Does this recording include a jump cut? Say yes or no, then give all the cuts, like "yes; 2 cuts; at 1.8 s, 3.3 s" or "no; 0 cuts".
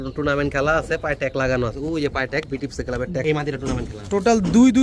yes; 2 cuts; at 1.8 s, 3.2 s